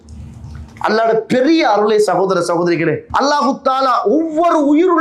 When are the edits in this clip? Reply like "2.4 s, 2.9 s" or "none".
3.0 s